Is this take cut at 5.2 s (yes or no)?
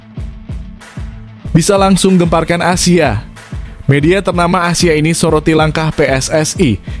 no